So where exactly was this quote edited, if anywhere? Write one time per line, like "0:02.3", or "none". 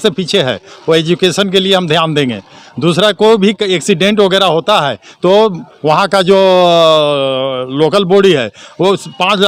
none